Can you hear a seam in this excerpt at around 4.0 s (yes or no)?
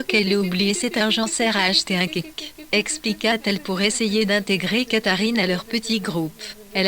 yes